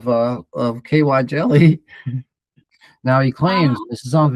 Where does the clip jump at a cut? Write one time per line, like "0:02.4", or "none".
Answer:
0:02.5